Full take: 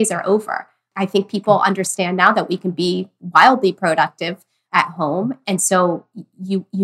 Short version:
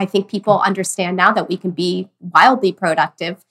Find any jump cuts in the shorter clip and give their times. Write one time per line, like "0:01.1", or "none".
none

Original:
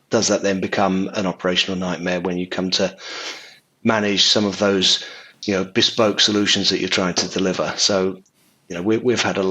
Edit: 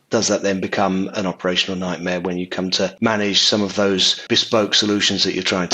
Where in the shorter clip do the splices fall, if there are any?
0:02.9
0:04.2

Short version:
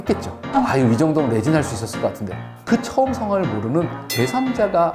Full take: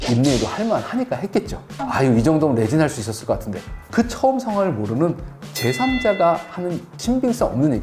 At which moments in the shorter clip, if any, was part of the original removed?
0:04.0

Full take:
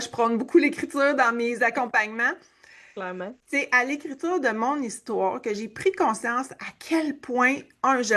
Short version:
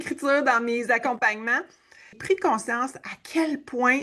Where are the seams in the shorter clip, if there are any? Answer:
0:02.1

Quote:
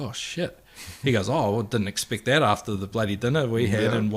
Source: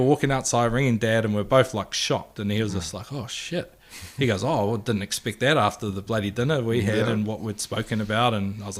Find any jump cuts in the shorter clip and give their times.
none

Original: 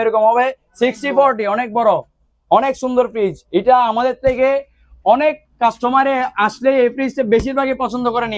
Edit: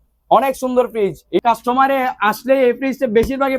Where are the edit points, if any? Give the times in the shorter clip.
0:01.4

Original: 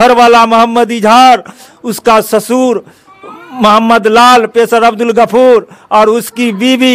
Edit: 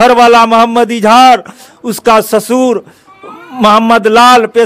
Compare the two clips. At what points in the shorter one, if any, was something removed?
none

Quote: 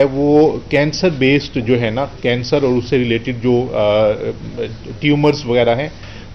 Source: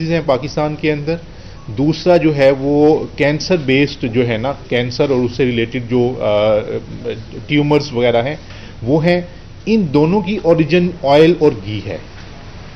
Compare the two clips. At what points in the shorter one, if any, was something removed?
none

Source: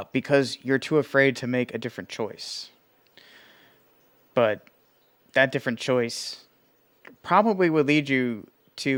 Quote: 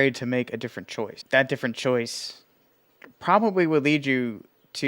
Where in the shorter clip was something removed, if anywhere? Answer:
0:01.2

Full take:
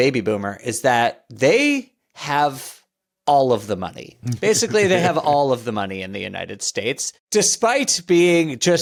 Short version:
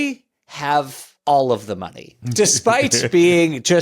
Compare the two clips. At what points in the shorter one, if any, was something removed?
0:01.0
0:02.2

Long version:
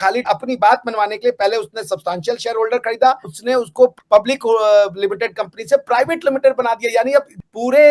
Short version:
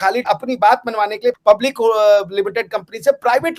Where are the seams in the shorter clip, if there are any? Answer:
0:01.3

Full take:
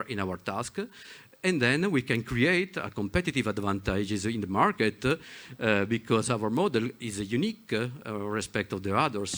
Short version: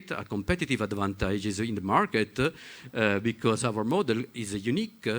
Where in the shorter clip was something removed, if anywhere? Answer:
none

